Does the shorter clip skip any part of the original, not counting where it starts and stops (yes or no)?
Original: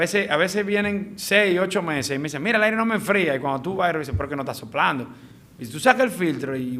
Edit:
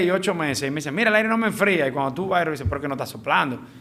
no